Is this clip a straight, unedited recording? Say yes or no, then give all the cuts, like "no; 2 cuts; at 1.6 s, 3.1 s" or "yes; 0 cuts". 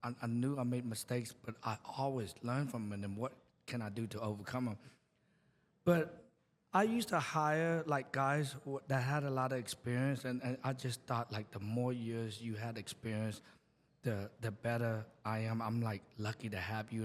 yes; 0 cuts